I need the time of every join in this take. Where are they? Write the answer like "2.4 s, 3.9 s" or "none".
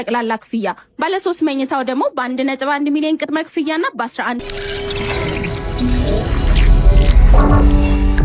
4.5 s

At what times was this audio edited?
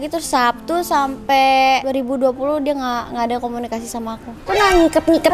4.4 s

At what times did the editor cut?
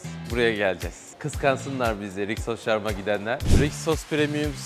1.0 s, 3.4 s

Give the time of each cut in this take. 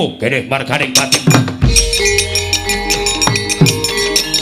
none

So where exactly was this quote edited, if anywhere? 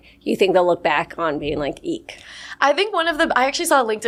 none

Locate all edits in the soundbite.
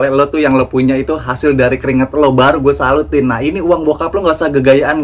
none

